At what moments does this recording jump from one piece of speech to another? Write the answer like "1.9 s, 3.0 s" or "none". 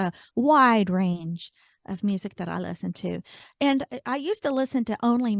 none